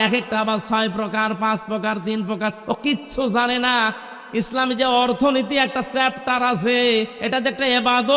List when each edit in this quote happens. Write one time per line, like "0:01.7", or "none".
none